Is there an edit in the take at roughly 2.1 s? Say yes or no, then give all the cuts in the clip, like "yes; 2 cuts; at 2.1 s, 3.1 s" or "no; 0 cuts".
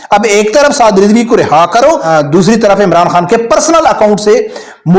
yes; 1 cut; at 2.1 s